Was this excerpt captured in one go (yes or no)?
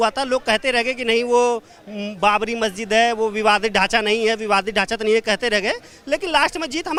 yes